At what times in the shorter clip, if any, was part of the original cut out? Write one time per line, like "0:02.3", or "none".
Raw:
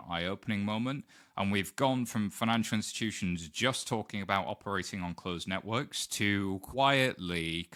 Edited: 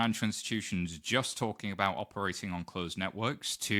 none

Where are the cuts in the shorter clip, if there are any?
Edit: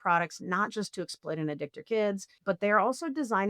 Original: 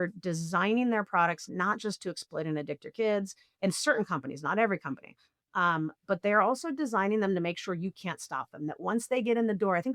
0:02.3

